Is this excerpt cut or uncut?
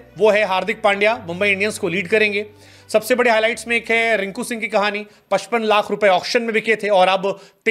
uncut